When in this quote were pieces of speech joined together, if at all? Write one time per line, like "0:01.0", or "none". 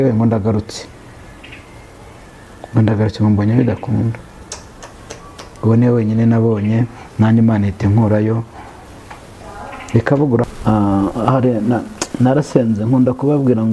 0:10.5